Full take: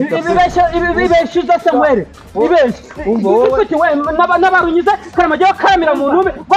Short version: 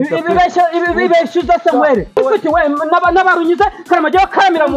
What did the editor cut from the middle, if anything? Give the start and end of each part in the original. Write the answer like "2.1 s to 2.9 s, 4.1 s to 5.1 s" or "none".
2.2 s to 3.4 s